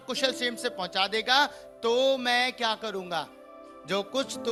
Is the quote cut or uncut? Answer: uncut